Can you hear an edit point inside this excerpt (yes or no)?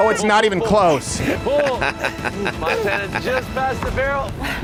no